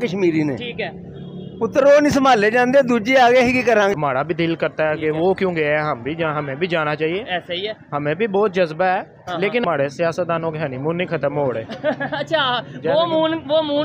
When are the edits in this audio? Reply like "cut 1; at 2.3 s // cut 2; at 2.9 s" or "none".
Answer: cut 1; at 3.9 s // cut 2; at 9.6 s